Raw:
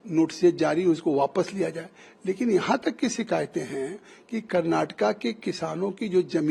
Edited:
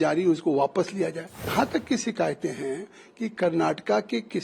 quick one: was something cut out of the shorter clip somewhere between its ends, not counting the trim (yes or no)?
yes